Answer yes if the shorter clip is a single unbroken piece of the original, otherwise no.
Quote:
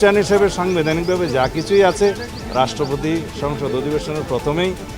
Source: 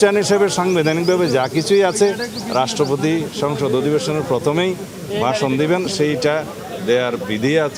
yes